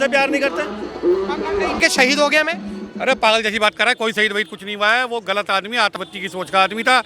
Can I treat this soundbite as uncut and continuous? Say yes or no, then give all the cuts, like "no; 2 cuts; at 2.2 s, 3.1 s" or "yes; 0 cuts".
no; 1 cut; at 1.8 s